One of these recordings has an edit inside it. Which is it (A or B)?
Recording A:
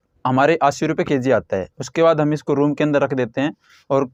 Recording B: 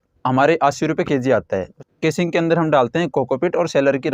B